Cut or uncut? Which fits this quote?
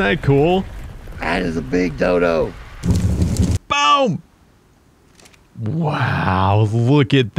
cut